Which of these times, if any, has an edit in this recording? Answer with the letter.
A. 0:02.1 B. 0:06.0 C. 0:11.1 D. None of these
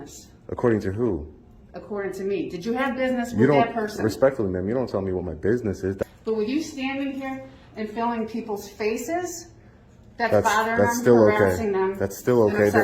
B